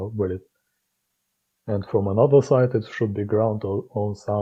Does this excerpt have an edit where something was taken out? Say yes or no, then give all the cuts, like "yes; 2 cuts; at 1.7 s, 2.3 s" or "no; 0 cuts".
no; 0 cuts